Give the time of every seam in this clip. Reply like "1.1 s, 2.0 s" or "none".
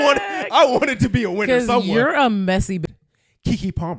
2.8 s